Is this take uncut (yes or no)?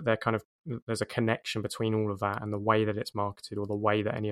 yes